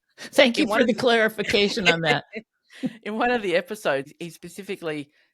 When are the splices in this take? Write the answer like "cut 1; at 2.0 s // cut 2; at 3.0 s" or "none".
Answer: cut 1; at 4.1 s